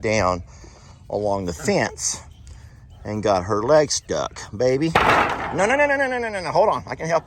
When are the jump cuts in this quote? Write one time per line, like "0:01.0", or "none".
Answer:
none